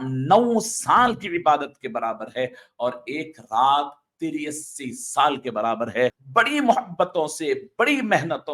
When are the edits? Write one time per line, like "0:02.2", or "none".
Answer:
0:06.2